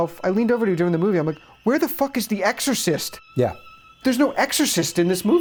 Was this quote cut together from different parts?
no; 0 cuts

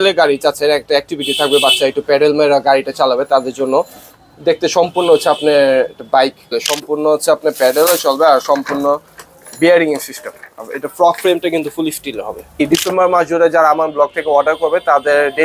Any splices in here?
yes; 2 cuts; at 6.7 s, 12.6 s

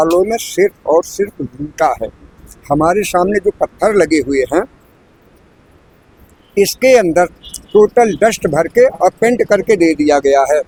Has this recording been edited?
no; 0 cuts

